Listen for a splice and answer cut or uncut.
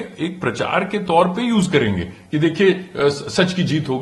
uncut